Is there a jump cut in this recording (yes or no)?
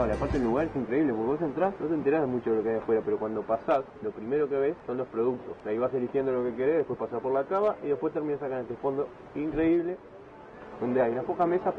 yes